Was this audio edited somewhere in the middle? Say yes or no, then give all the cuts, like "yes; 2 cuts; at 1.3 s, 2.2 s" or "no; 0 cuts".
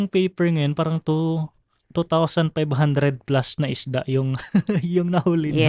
no; 0 cuts